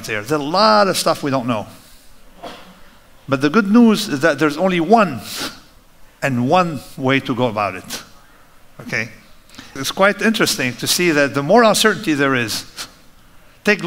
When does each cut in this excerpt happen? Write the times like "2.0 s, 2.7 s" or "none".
9.7 s